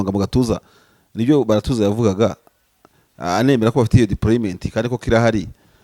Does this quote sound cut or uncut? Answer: uncut